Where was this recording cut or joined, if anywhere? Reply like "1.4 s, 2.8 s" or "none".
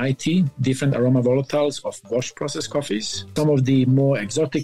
3.3 s